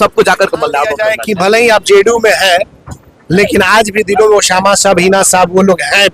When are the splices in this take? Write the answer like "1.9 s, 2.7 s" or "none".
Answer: 1.1 s